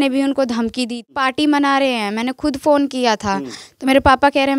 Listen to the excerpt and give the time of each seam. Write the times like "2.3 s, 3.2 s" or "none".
1.2 s